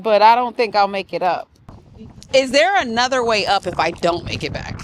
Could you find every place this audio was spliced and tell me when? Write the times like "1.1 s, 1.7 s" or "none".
1.6 s